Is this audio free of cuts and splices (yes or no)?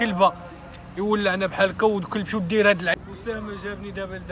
no